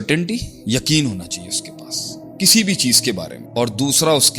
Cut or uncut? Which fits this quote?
cut